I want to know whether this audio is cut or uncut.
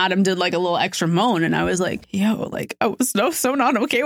cut